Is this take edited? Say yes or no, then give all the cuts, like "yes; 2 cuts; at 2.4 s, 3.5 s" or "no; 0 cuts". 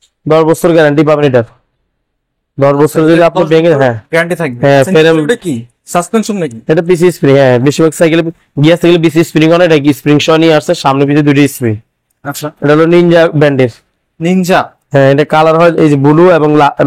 no; 0 cuts